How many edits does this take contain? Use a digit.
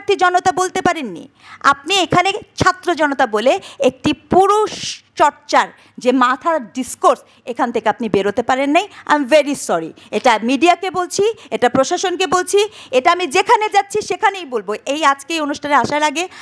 0